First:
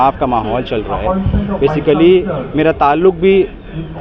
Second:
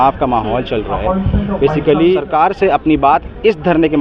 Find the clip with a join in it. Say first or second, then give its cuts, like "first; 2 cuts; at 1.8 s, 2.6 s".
second; 1 cut; at 2.2 s